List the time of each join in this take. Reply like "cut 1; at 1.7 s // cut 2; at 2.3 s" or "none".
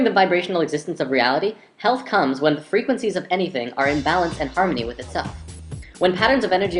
none